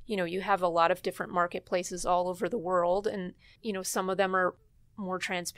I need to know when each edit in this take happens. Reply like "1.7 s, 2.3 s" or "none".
3.5 s, 4.6 s